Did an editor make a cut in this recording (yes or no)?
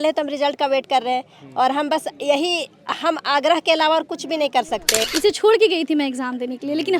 yes